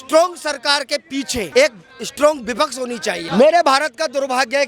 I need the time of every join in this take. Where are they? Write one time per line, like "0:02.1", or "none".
0:01.5
0:03.2